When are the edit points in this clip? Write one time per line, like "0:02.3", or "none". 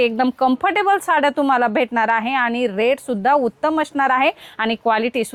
none